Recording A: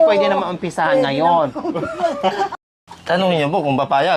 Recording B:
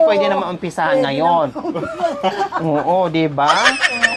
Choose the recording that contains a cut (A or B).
A